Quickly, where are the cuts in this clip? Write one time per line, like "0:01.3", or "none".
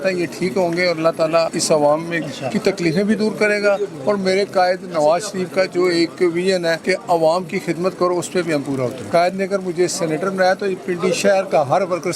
0:01.6
0:06.8
0:09.0